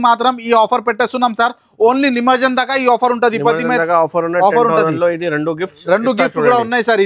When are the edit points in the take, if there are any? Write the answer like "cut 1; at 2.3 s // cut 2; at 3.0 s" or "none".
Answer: none